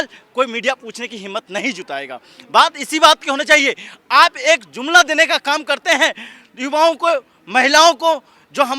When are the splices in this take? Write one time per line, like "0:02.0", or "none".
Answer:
none